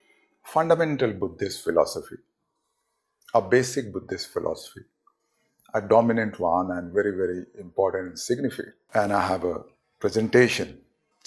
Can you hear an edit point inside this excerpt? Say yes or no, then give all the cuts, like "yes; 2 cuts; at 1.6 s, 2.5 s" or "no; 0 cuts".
yes; 1 cut; at 8.7 s